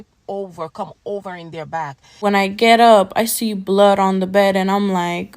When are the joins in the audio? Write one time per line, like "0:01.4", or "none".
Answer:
0:02.2

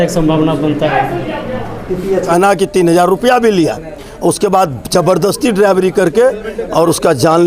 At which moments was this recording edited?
0:02.3

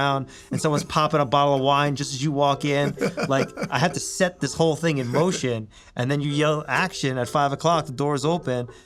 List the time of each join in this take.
none

